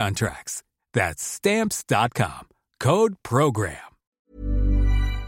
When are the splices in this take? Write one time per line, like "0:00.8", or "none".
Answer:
0:04.1